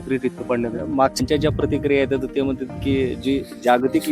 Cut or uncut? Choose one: cut